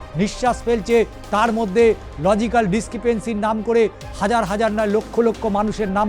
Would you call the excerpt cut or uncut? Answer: uncut